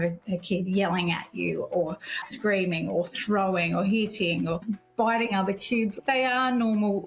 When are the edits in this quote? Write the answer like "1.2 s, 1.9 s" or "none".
4.6 s, 6.0 s